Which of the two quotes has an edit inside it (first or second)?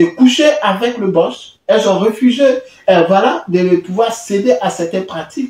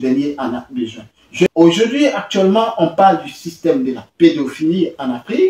second